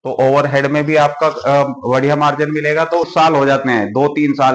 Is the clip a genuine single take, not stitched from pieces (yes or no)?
no